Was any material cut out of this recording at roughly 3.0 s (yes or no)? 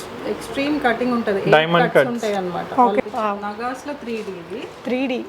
yes